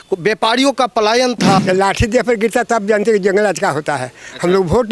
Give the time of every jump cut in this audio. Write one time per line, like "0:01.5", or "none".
0:01.6